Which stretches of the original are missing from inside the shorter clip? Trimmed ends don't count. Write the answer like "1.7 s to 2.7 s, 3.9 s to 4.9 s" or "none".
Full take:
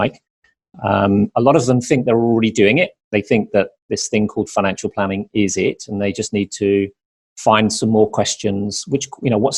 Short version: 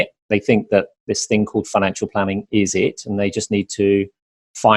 none